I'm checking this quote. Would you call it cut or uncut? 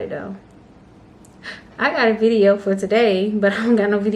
uncut